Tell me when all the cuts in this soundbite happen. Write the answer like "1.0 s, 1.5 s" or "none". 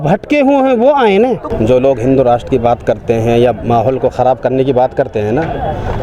1.5 s